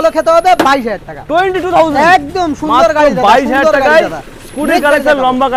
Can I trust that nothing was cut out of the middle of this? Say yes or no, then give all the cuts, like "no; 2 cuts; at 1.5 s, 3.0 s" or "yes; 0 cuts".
yes; 0 cuts